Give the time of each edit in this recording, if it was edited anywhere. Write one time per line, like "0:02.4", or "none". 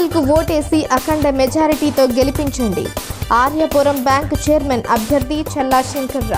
none